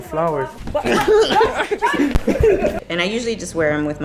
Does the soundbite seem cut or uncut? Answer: cut